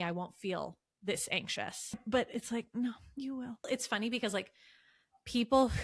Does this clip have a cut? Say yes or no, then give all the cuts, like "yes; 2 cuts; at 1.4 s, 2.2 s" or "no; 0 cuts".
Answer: yes; 2 cuts; at 2.0 s, 3.7 s